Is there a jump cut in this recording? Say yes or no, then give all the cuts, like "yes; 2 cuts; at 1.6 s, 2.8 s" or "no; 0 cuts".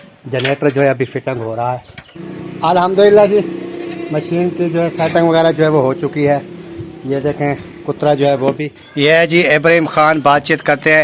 yes; 2 cuts; at 1.5 s, 8.5 s